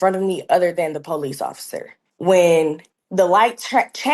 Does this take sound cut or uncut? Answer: uncut